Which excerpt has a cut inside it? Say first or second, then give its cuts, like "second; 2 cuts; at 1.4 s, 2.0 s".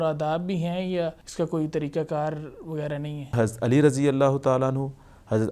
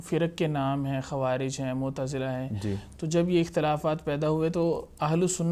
first; 2 cuts; at 1.2 s, 3.3 s